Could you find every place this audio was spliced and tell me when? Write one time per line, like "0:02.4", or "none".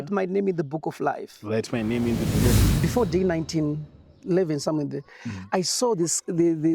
0:02.6

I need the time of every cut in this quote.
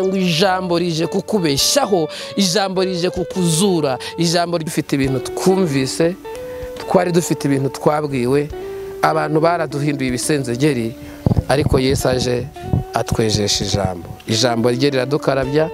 0:04.7

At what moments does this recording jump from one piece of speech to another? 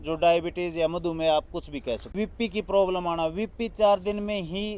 0:02.1

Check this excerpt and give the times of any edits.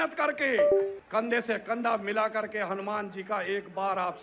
0:01.0

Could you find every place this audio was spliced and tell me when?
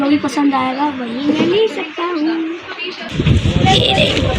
0:03.0

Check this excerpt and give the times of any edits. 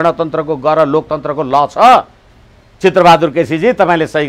none

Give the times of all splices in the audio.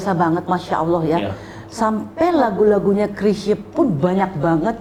none

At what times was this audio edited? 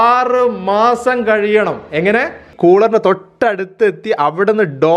0:02.5

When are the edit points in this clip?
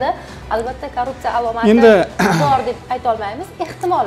none

